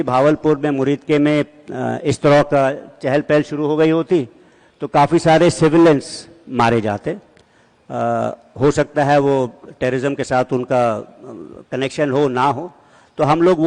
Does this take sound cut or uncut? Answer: uncut